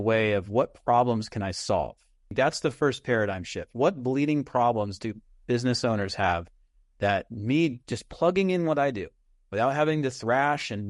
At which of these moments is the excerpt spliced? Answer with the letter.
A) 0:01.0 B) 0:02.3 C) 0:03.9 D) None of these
B